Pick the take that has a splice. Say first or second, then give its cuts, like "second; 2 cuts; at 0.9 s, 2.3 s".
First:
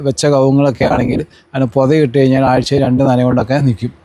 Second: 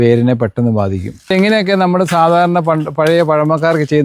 second; 1 cut; at 1.3 s